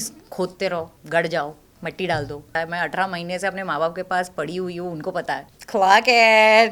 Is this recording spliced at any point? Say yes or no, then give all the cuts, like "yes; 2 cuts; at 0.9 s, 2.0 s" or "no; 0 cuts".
yes; 2 cuts; at 2.6 s, 5.5 s